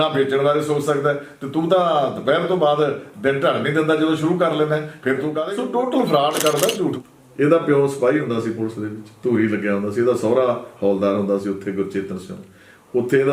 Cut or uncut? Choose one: cut